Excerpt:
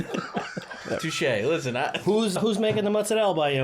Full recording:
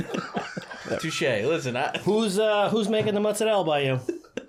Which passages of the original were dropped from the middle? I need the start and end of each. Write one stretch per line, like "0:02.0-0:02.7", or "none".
0:02.4-0:02.7

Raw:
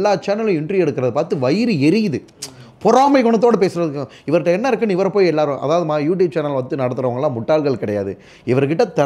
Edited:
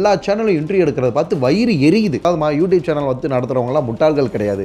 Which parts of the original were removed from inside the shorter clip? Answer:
0:02.2-0:05.7

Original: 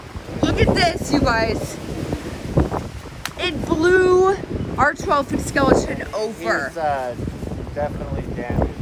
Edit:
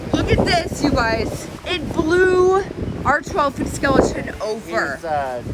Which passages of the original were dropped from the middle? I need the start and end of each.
0:01.8-0:03.2

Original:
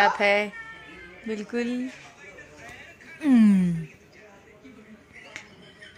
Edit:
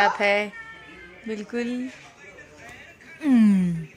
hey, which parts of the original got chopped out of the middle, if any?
none

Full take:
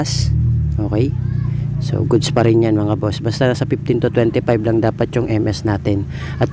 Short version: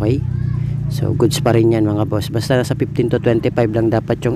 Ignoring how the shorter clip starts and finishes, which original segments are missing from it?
none

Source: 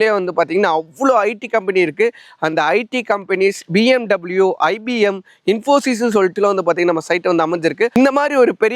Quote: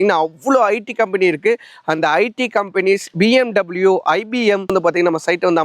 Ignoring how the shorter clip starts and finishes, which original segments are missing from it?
0:05.2-0:06.5

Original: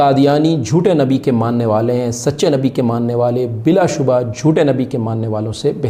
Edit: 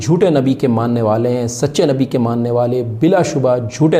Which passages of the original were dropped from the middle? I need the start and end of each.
none

